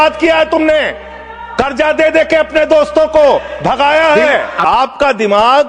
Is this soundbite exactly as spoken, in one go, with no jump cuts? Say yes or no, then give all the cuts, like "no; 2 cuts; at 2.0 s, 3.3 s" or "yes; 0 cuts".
yes; 0 cuts